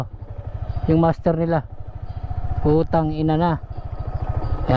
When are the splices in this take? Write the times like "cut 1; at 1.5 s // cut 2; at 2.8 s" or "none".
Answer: cut 1; at 3.9 s